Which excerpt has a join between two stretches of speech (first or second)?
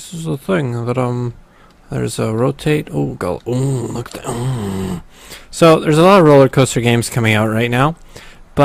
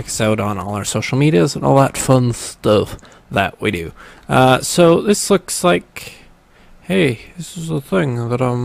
first